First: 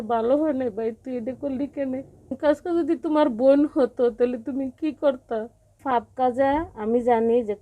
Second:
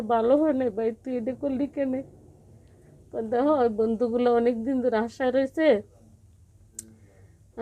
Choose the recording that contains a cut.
first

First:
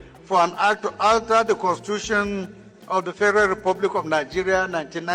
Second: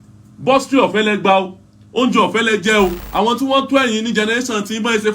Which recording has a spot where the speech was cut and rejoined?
second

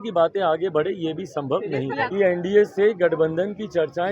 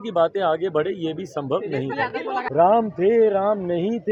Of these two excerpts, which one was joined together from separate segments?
first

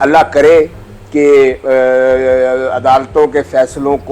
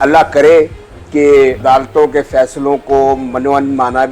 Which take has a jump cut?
second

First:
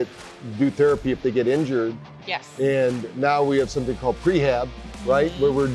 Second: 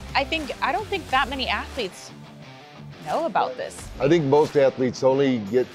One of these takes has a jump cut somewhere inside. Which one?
second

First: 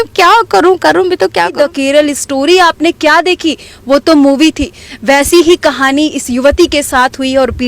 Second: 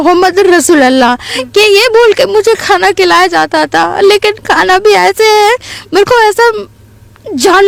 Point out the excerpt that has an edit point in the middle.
first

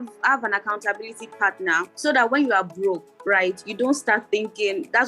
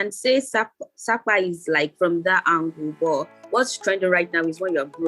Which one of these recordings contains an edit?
first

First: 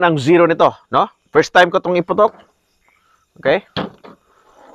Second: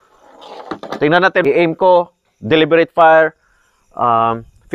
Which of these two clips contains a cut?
second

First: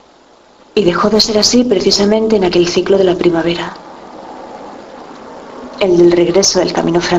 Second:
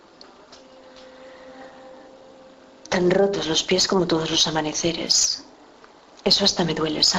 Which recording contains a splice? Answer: second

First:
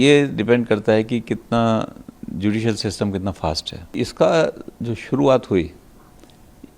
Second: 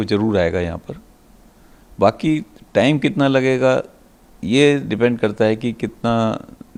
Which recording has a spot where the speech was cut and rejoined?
first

